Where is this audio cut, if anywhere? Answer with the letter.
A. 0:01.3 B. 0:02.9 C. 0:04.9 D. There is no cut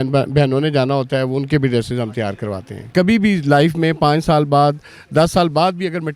B